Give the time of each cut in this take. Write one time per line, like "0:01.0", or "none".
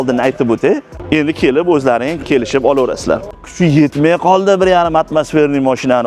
0:00.9
0:03.4